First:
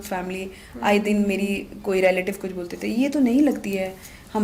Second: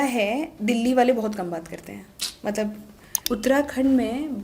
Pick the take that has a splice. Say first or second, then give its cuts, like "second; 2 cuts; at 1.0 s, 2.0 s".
second; 1 cut; at 3.2 s